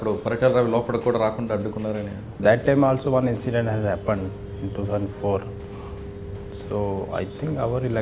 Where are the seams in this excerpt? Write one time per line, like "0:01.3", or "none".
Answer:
0:02.4